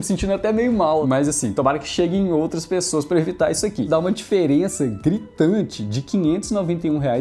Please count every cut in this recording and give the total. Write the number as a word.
two